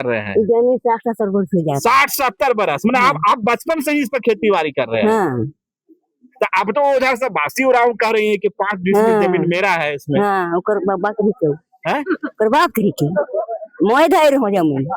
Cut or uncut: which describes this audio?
uncut